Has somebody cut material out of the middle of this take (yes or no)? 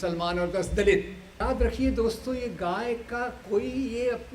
yes